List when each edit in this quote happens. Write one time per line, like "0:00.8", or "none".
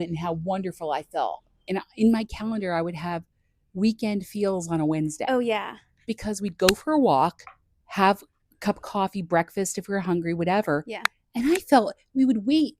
0:01.7